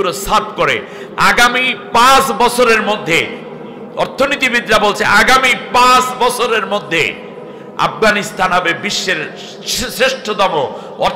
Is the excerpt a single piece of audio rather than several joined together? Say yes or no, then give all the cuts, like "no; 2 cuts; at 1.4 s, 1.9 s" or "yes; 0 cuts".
yes; 0 cuts